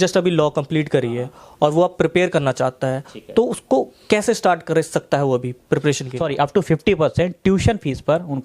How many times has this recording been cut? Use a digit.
1